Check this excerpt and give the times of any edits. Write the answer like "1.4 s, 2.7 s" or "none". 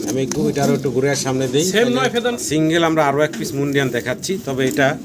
2.4 s